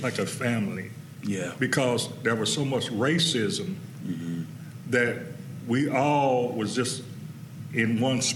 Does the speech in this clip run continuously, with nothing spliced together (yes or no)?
yes